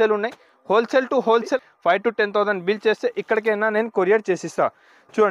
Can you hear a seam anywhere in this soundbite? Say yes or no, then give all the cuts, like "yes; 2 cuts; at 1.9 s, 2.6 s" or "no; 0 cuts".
yes; 1 cut; at 1.6 s